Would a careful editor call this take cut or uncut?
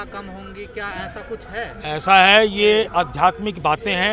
uncut